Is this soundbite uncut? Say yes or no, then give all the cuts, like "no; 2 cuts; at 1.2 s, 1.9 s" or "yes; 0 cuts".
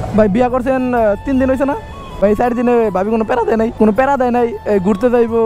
no; 2 cuts; at 2.0 s, 3.7 s